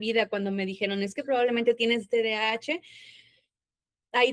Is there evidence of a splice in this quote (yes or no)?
no